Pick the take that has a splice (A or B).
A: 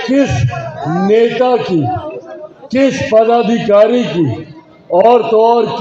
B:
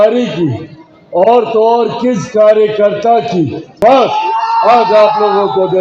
B